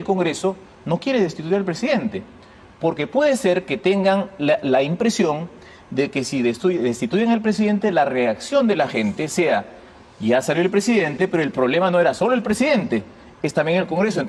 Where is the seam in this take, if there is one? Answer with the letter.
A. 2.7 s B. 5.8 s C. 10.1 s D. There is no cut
D